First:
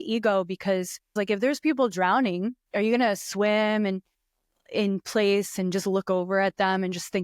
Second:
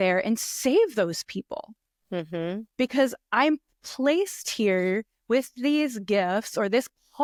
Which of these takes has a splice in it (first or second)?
first